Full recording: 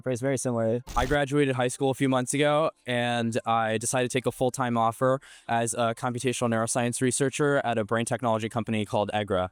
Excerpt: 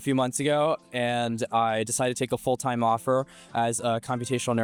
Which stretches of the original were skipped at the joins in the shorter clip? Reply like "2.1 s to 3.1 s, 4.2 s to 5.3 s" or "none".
none